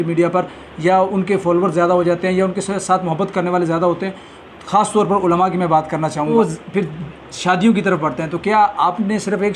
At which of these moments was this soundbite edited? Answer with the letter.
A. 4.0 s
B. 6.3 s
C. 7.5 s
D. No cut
B